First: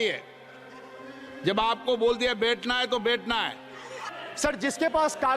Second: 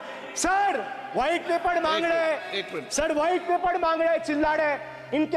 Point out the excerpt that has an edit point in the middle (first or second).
first